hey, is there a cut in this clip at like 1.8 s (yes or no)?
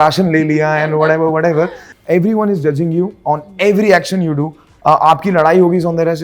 yes